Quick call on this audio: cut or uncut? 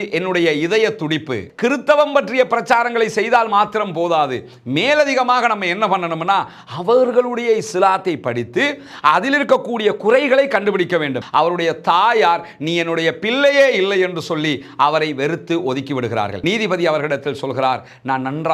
cut